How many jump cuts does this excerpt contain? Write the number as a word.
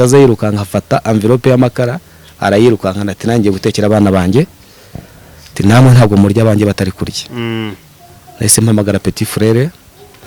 zero